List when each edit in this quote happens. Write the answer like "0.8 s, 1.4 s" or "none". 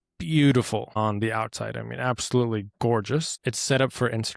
1.0 s, 3.3 s